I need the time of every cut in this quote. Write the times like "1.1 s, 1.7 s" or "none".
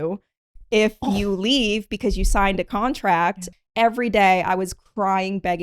3.4 s